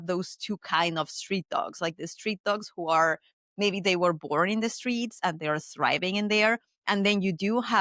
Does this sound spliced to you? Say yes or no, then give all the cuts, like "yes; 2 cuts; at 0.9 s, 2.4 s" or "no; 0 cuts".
no; 0 cuts